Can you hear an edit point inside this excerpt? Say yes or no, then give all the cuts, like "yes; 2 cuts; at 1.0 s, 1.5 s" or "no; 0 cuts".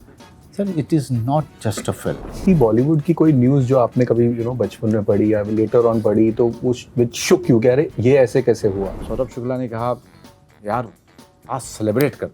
yes; 2 cuts; at 2.4 s, 9.0 s